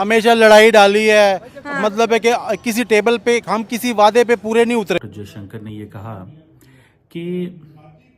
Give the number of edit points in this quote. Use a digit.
1